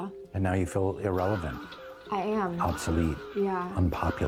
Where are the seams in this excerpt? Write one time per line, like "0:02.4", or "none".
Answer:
none